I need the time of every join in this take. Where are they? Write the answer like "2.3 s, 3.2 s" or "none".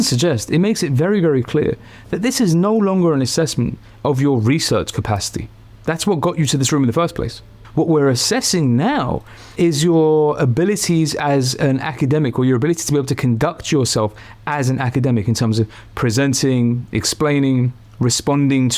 7.5 s